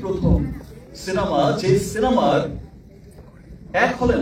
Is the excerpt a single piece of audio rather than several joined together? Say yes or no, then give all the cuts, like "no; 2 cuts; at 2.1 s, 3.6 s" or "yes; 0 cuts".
yes; 0 cuts